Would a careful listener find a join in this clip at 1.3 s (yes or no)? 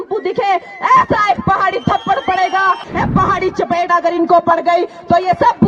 no